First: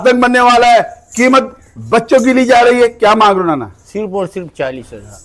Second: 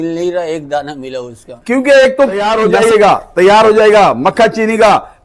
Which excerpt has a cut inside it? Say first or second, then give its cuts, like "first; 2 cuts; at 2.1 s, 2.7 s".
second; 1 cut; at 2.4 s